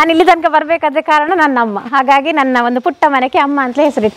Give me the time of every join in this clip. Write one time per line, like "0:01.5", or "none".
none